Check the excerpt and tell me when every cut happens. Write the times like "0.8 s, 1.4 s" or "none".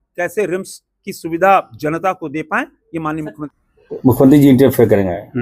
4.1 s